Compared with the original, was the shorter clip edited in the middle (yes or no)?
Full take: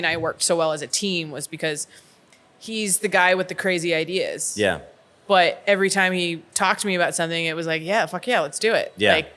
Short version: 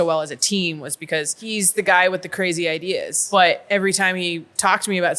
yes